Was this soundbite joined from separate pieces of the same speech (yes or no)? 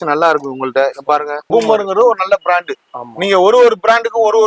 yes